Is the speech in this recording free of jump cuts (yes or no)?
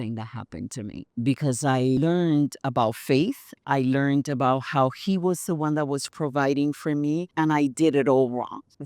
no